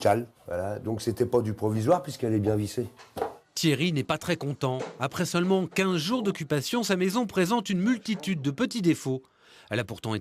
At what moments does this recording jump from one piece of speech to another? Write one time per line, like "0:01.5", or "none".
0:07.5